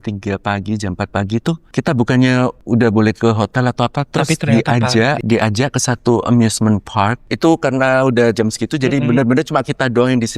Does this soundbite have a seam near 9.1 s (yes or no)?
no